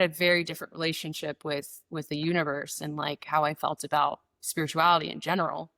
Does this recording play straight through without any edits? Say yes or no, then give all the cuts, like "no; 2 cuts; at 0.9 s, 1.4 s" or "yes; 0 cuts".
yes; 0 cuts